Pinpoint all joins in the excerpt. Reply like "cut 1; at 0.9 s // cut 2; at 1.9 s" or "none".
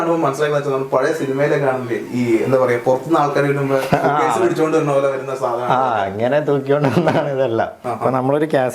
cut 1; at 7.8 s